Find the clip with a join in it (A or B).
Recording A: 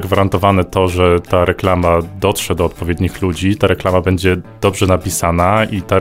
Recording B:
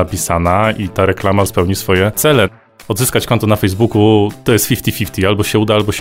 B